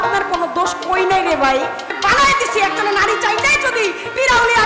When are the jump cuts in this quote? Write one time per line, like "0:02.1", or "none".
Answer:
0:01.9